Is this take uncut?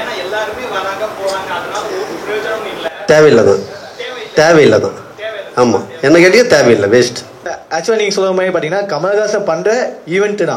no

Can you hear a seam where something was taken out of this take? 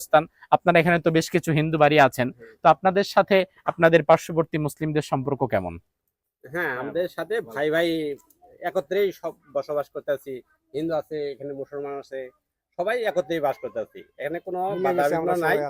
no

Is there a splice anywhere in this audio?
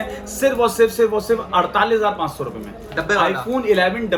no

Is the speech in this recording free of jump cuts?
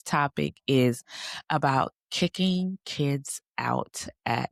yes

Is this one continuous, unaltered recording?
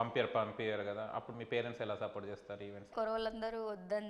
no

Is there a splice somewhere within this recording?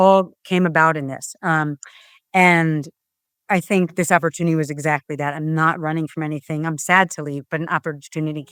no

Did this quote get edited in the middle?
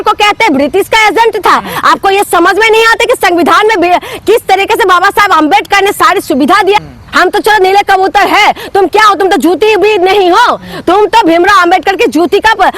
yes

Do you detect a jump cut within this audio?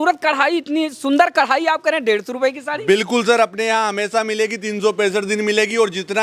no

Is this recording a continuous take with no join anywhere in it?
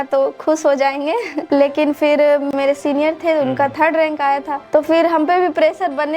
no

